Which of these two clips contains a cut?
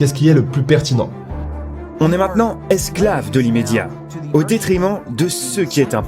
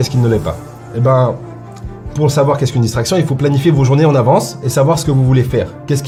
first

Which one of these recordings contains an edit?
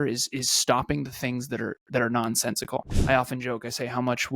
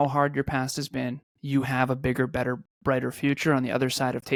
first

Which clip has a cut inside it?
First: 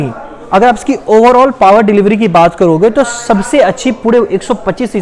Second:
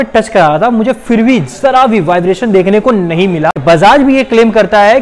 second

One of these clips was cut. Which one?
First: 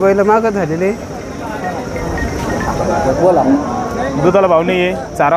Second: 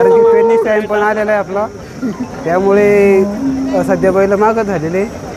first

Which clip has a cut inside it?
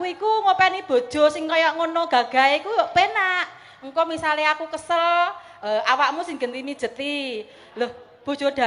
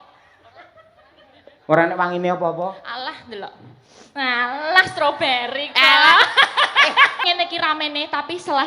second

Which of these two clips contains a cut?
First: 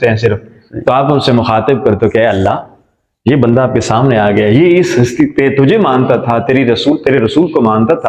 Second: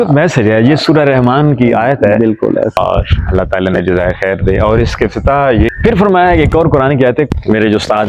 second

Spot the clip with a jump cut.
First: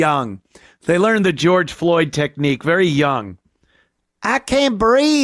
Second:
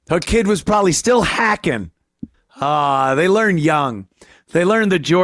second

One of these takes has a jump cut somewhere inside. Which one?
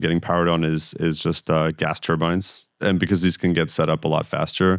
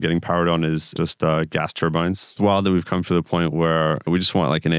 second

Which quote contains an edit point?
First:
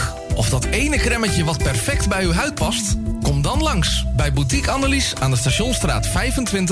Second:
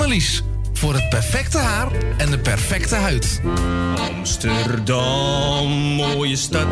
second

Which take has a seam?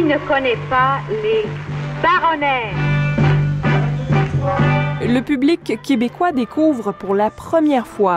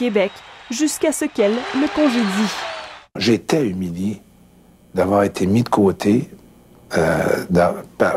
second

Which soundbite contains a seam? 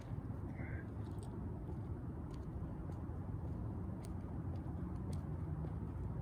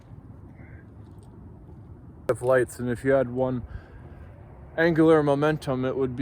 second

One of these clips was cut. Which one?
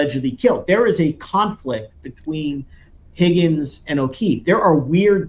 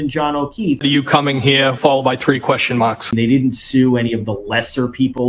second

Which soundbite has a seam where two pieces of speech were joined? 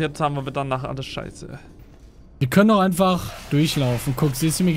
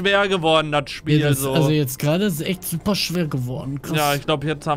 first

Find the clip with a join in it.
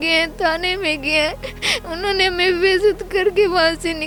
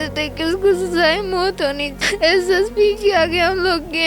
second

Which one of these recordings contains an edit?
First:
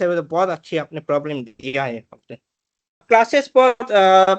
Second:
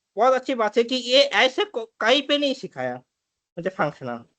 first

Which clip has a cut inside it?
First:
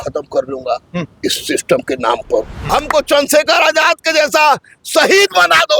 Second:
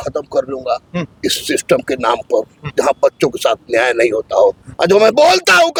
first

